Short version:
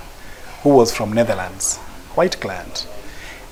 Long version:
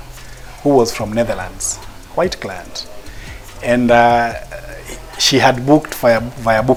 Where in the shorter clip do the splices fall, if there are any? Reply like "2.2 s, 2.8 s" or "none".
none

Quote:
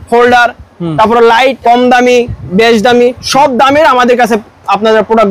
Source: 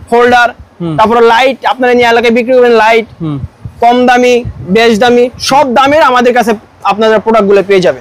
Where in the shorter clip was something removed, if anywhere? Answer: 1.6 s

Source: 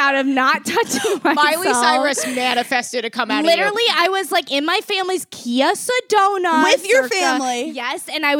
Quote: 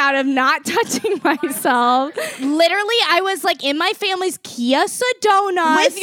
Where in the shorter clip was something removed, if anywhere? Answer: 2.3 s

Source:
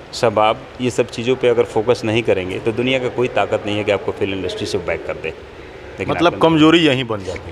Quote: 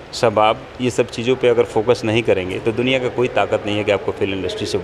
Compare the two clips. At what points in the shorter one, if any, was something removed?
none

